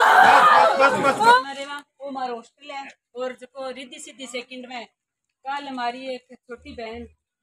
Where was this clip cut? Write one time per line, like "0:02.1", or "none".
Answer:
0:01.4